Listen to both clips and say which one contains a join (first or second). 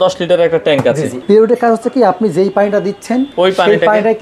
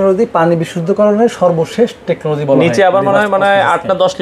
first